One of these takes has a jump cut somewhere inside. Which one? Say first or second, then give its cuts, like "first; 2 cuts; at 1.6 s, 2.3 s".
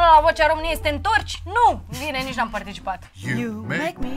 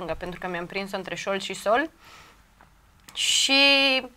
first; 1 cut; at 3.1 s